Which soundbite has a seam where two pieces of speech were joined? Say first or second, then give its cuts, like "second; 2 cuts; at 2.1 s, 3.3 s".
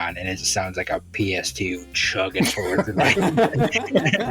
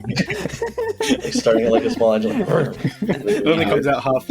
second; 2 cuts; at 1.1 s, 2.9 s